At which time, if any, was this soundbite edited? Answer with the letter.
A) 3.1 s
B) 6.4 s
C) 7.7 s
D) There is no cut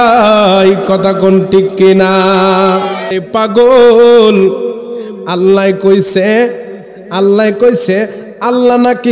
A